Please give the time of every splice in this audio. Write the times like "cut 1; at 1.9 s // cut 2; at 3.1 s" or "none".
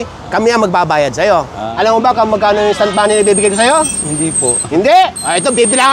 cut 1; at 1.6 s

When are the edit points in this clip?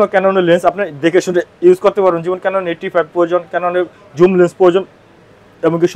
none

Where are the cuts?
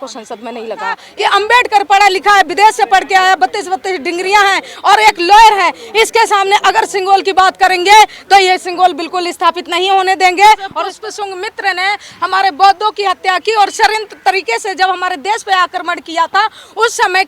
cut 1; at 1.1 s // cut 2; at 10.8 s

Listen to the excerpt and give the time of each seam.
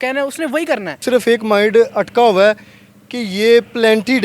cut 1; at 1.0 s

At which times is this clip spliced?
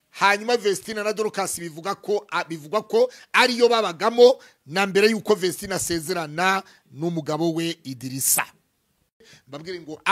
cut 1; at 9.2 s

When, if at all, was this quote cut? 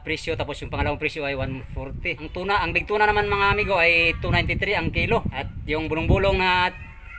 cut 1; at 2.2 s // cut 2; at 5.3 s

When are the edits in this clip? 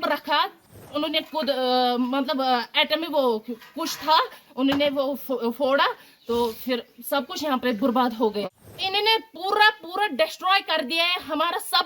cut 1; at 0.8 s // cut 2; at 8.4 s

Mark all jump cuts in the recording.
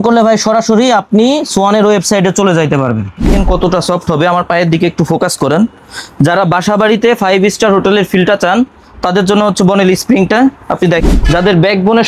cut 1; at 3.3 s // cut 2; at 11.0 s

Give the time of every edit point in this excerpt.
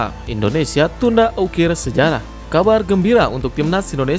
cut 1; at 2.3 s

